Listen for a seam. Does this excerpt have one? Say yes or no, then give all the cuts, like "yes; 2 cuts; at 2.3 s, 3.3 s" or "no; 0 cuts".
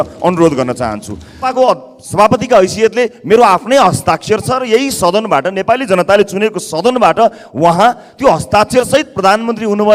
yes; 1 cut; at 1.5 s